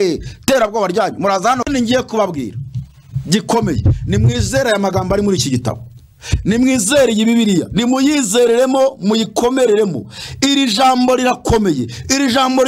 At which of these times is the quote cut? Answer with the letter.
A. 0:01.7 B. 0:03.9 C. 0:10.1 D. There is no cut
A